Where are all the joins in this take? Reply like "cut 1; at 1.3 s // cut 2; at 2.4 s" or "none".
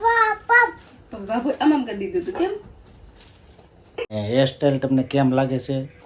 cut 1; at 4.1 s